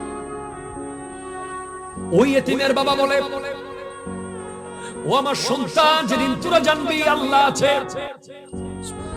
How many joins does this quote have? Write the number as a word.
four